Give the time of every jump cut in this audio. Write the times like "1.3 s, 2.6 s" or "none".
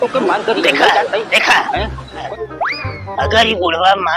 2.3 s